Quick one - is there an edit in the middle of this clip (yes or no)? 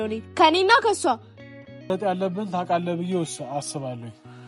yes